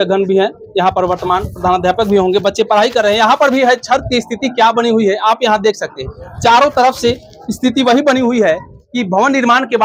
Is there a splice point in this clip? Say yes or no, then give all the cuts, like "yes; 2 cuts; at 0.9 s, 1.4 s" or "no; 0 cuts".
no; 0 cuts